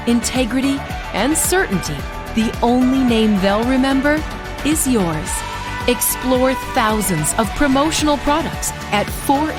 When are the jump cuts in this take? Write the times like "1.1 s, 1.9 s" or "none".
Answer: none